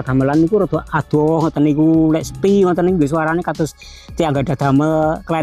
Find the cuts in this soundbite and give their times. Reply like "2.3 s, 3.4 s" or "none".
none